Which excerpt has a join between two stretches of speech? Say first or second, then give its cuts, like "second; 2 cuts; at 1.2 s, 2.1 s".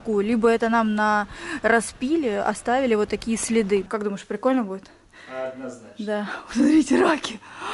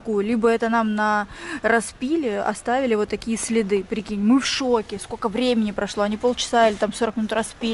first; 1 cut; at 3.9 s